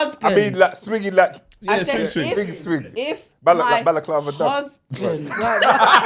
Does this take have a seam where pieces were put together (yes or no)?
no